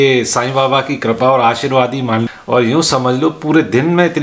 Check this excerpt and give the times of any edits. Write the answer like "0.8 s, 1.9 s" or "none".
2.2 s

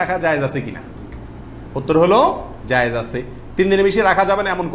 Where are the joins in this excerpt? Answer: none

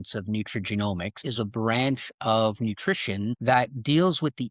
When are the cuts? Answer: 1.2 s, 3.4 s

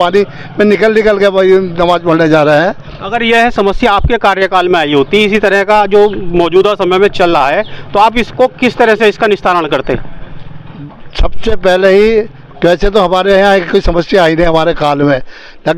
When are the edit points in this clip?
none

